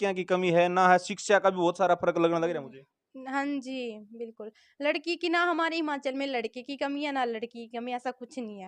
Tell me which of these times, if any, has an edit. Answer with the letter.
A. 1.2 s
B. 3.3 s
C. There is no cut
C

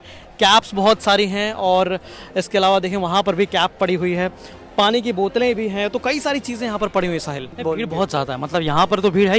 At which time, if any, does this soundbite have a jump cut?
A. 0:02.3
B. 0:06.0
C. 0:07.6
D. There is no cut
C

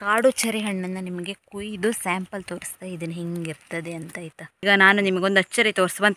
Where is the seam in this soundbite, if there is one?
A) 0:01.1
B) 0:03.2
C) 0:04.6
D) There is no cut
C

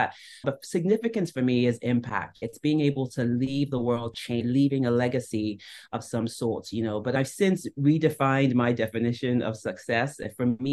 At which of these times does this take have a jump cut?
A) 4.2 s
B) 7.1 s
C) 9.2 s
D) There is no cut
D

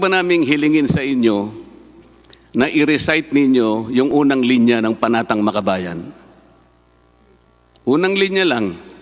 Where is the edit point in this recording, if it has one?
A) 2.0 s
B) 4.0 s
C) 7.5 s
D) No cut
C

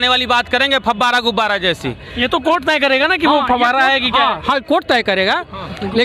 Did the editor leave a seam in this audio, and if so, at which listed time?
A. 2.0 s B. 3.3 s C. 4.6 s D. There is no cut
A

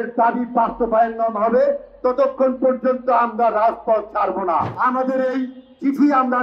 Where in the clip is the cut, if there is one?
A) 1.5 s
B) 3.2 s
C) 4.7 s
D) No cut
C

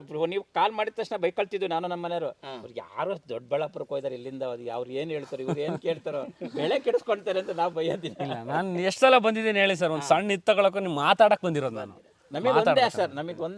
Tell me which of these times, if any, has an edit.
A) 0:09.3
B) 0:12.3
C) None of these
C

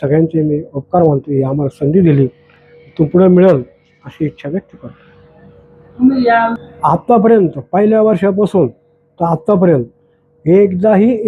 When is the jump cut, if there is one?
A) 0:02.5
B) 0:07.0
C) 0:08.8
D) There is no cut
D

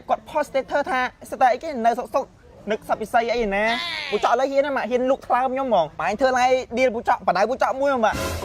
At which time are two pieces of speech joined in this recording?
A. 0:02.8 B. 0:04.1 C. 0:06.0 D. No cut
C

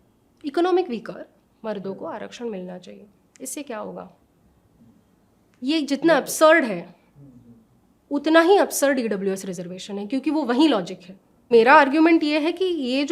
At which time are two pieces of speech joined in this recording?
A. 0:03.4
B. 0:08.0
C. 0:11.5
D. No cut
C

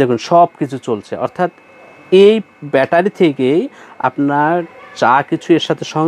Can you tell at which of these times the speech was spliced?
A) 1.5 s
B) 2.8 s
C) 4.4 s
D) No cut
D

